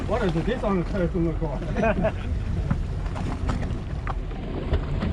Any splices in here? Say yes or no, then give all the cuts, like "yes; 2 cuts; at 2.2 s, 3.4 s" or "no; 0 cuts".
no; 0 cuts